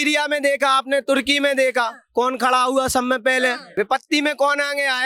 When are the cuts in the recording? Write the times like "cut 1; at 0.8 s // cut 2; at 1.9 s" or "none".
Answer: cut 1; at 3.6 s